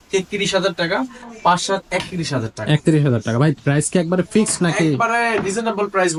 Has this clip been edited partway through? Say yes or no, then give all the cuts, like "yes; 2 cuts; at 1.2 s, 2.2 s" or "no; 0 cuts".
no; 0 cuts